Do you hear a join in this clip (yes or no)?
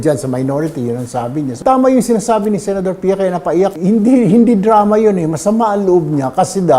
yes